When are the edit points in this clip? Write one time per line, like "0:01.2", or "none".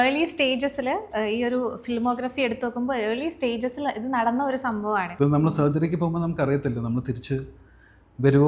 0:05.1